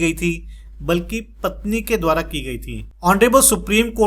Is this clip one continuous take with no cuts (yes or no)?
no